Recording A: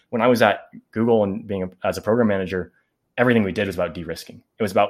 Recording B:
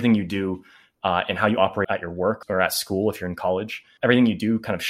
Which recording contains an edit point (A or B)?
B